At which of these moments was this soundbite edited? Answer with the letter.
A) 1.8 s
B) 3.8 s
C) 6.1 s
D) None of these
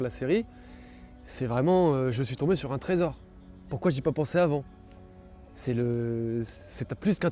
D